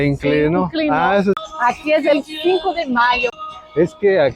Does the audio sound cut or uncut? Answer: uncut